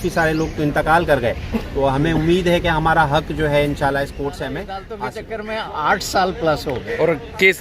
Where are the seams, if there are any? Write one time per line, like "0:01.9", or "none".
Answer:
0:05.0